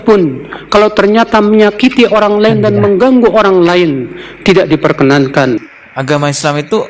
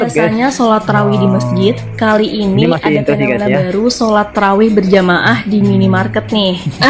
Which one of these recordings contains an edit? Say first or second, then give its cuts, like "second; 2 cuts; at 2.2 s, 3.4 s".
first; 1 cut; at 5.7 s